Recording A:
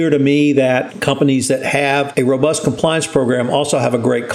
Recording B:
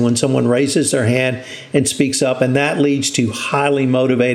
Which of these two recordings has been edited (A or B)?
A